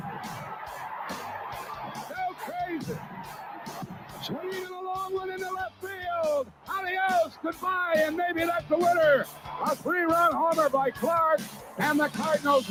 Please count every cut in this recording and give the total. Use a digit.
0